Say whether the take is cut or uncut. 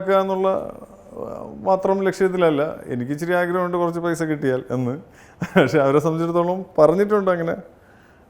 uncut